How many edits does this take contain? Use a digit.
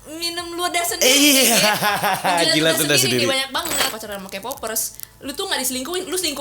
1